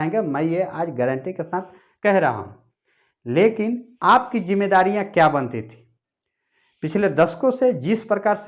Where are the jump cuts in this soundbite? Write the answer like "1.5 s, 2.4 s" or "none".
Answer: none